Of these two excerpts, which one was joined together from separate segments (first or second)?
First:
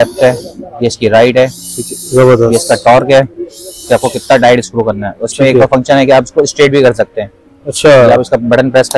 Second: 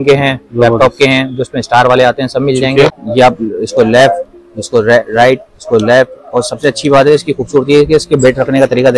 second